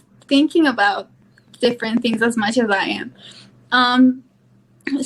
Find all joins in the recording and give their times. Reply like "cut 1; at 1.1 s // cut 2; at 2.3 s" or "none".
none